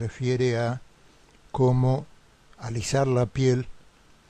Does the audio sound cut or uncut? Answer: cut